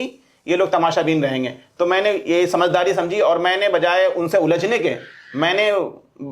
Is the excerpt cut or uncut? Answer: uncut